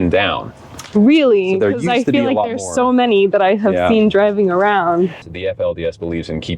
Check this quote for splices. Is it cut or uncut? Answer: cut